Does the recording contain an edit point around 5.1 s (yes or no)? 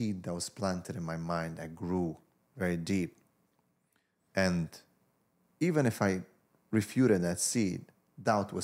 no